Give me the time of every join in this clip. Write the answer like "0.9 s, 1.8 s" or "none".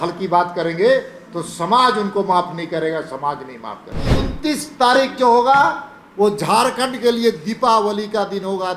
4.2 s

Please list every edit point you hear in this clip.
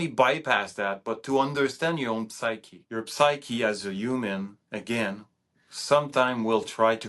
2.7 s

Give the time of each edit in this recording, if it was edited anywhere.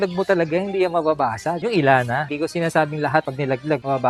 none

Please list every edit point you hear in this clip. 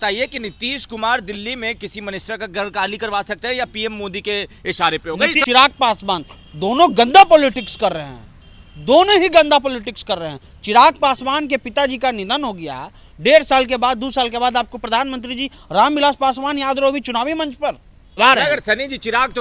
5.4 s, 18.2 s

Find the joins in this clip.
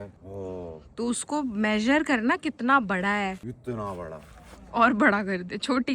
3.4 s

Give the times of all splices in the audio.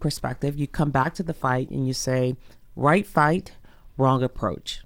none

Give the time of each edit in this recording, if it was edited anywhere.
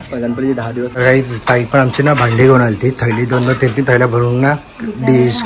1.0 s

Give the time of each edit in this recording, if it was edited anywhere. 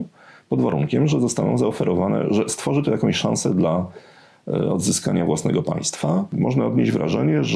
6.3 s

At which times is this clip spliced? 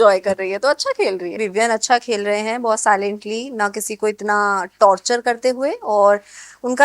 1.4 s

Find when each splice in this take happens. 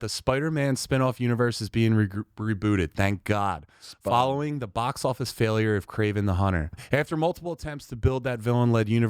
6.8 s

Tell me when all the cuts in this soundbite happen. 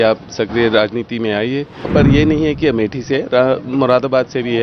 1.9 s

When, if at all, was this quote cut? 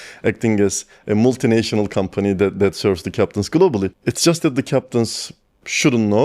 3.9 s

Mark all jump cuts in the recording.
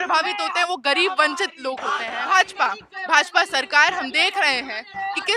2.1 s

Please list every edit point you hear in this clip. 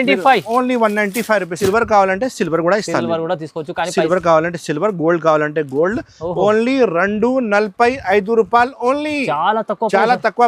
1.5 s

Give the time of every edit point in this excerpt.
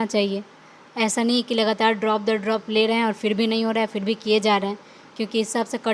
none

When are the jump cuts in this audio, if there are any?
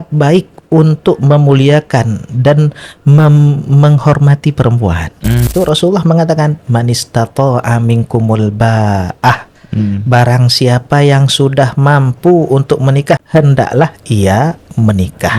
5.5 s, 13.2 s

